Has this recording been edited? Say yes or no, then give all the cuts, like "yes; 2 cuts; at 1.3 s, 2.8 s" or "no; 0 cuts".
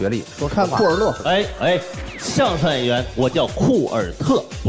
no; 0 cuts